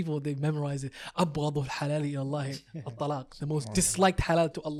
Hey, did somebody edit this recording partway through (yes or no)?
no